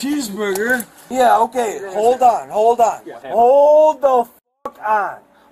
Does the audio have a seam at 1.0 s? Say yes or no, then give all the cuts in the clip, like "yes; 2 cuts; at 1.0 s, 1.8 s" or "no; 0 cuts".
yes; 1 cut; at 1.0 s